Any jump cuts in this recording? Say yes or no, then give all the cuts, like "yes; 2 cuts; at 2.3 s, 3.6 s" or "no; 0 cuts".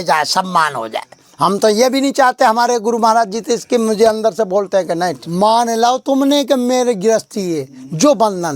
yes; 1 cut; at 5.2 s